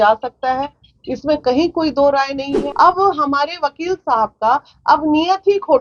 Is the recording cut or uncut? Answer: cut